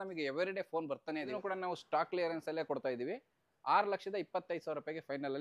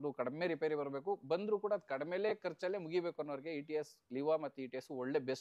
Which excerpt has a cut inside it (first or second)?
first